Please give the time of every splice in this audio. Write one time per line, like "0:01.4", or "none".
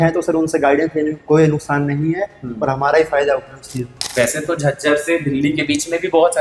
0:03.9